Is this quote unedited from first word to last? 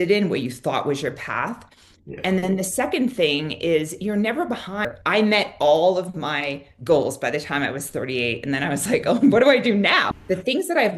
no; 2 cuts; at 4.9 s, 10.0 s

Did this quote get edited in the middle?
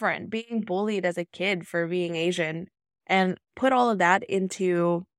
no; 0 cuts

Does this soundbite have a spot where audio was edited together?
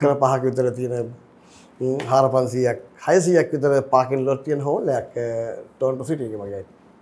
no; 0 cuts

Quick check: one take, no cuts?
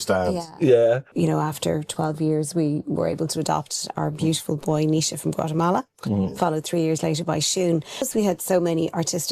no; 2 cuts; at 1.1 s, 8.1 s

